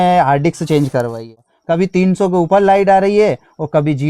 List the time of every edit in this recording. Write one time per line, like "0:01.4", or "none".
0:01.3